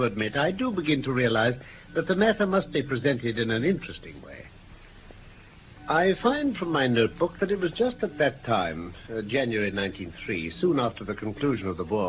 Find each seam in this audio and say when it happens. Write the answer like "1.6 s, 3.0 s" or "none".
none